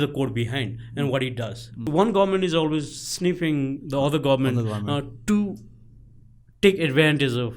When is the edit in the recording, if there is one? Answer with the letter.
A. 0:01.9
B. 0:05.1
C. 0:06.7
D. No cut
A